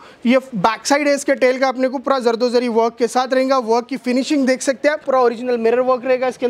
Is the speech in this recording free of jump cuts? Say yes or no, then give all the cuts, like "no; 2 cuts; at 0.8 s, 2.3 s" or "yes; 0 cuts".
no; 1 cut; at 5.0 s